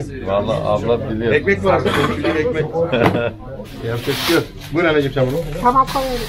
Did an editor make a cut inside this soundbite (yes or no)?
no